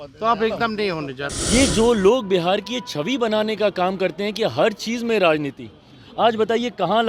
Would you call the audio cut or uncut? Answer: cut